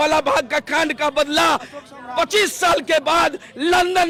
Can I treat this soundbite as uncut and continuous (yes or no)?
yes